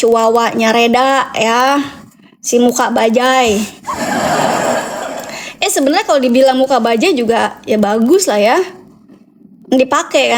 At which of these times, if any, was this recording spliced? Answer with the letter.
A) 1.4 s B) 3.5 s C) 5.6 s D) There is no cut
D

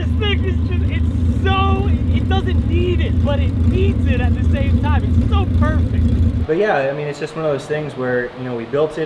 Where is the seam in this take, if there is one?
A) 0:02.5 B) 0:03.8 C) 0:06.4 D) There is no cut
C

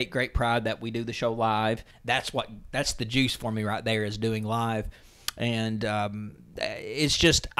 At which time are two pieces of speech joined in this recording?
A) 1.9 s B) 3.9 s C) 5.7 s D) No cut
A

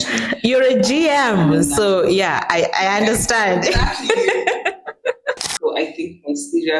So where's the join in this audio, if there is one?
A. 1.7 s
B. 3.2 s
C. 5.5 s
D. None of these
C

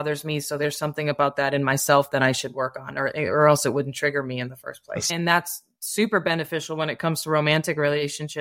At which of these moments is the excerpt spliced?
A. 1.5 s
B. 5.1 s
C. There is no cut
B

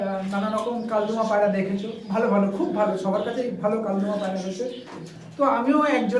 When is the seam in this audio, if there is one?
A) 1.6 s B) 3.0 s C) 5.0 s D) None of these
C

